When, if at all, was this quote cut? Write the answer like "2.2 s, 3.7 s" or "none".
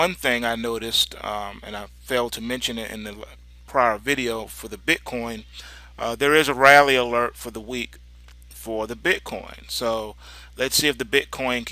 9.7 s